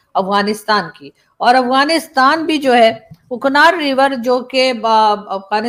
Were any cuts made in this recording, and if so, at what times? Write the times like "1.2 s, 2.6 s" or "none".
none